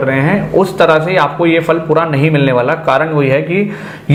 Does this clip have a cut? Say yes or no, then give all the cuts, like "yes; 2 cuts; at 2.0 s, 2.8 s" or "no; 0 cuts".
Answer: no; 0 cuts